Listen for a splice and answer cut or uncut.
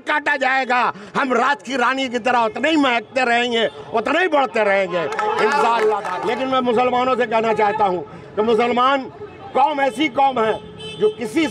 cut